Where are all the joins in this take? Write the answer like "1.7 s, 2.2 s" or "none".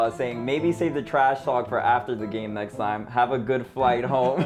none